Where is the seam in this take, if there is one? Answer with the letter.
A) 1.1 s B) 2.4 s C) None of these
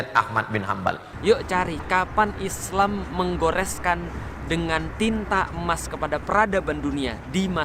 A